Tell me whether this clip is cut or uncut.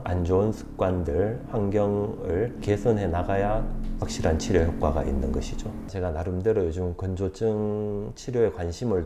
cut